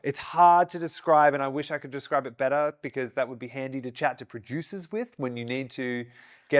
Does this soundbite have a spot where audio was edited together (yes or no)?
no